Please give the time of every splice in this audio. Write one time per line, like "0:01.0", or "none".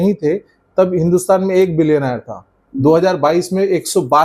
none